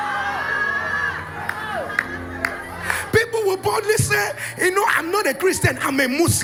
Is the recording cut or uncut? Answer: uncut